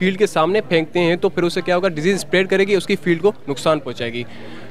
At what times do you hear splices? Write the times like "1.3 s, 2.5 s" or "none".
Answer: none